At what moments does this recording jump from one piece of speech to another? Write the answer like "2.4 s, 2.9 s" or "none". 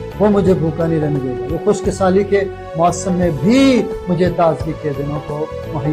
none